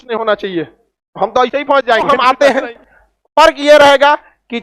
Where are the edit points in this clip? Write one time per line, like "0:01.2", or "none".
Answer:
0:02.1